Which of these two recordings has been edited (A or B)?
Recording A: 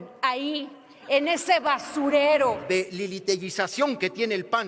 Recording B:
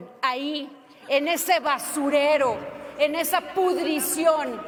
A